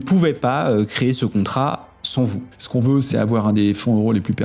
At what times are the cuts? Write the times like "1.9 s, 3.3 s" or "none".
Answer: 2.6 s

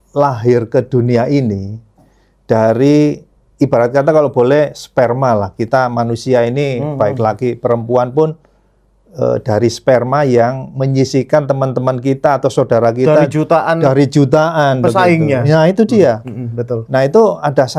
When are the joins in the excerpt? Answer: 3.4 s

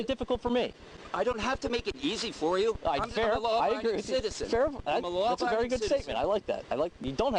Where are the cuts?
none

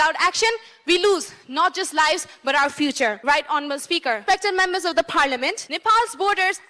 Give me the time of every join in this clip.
3.2 s, 4.2 s, 5.7 s

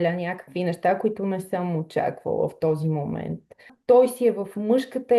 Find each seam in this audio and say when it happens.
3.7 s

